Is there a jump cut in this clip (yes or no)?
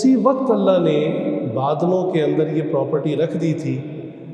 no